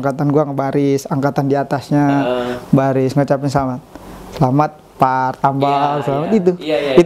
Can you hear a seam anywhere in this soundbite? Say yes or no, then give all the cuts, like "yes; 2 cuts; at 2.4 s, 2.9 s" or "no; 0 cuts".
no; 0 cuts